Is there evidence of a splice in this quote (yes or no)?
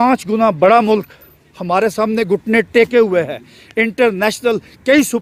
no